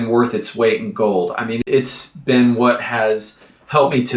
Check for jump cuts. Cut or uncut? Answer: cut